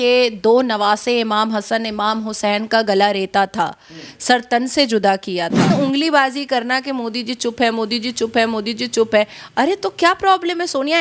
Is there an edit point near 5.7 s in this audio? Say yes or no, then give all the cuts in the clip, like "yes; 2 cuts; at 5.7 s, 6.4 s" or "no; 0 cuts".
yes; 1 cut; at 5.7 s